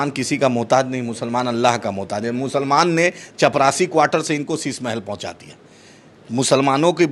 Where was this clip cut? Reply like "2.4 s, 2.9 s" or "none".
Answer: none